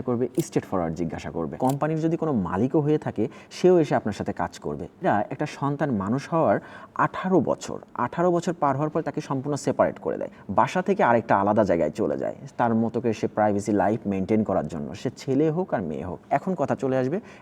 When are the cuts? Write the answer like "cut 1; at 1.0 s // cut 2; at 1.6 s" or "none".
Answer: cut 1; at 1.5 s // cut 2; at 5.0 s // cut 3; at 10.3 s